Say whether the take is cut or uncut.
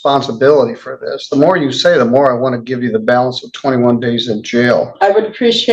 uncut